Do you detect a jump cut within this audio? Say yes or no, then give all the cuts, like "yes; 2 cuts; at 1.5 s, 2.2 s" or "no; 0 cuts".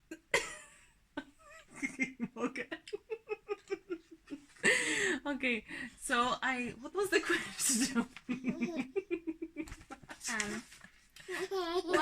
no; 0 cuts